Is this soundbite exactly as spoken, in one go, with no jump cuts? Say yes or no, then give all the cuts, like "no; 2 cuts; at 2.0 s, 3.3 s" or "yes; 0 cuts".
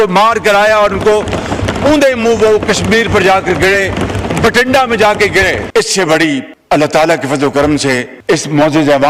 yes; 0 cuts